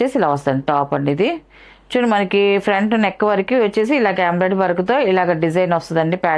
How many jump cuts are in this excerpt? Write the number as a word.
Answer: zero